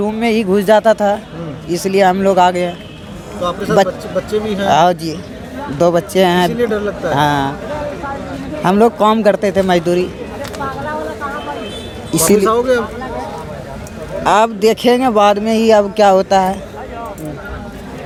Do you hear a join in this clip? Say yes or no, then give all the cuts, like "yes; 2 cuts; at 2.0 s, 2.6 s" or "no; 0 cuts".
no; 0 cuts